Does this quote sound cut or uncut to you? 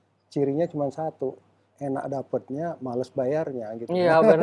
uncut